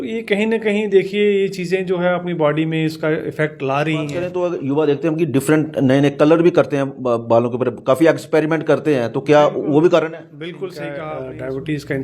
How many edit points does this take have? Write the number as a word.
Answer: two